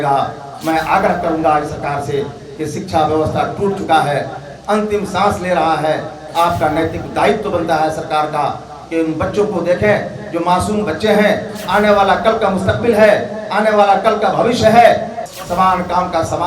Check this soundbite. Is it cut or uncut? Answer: cut